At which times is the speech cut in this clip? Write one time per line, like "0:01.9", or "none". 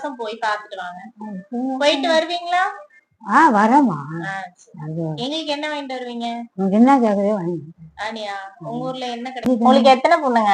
0:09.5